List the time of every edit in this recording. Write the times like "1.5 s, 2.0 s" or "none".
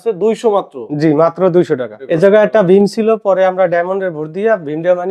2.0 s